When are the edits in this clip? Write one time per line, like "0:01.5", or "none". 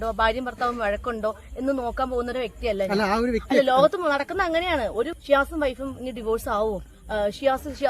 0:05.1